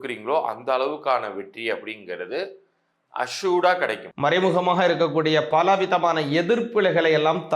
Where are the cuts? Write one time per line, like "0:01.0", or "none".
0:04.1